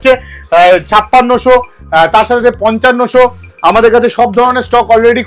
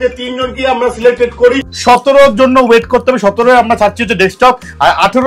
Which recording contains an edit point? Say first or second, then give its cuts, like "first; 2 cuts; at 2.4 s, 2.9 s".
second; 1 cut; at 1.7 s